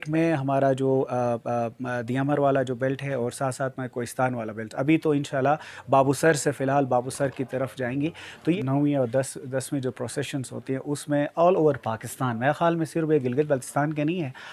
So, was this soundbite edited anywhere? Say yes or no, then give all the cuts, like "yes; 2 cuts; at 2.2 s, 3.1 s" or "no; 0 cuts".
yes; 1 cut; at 8.6 s